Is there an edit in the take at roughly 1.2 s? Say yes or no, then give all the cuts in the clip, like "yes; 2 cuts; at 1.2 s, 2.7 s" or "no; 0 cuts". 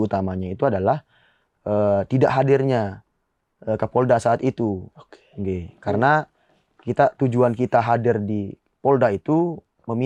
no; 0 cuts